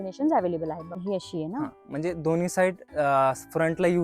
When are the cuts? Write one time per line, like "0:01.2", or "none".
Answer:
0:00.9